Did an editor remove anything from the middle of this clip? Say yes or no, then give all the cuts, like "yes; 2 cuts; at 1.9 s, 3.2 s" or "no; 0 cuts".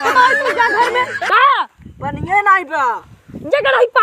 yes; 1 cut; at 1.2 s